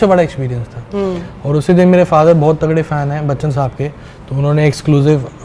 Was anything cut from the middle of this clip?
no; 0 cuts

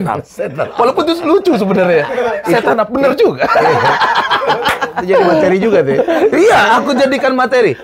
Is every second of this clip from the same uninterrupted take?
yes; 0 cuts

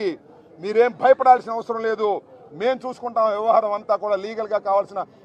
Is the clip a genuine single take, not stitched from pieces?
yes; 0 cuts

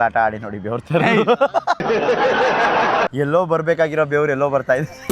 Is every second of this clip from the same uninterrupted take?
no; 1 cut; at 3.1 s

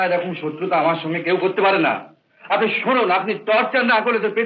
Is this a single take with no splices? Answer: yes; 0 cuts

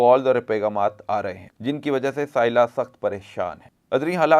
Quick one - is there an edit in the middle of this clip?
yes; 1 cut; at 1.5 s

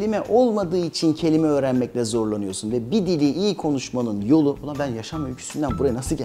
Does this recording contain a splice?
no; 0 cuts

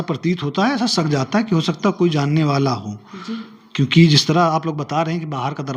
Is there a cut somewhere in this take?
no; 0 cuts

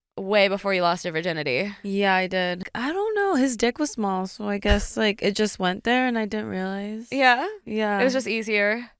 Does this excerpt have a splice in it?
yes; 1 cut; at 2.6 s

